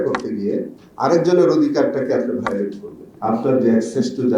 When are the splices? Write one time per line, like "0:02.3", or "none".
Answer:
0:03.0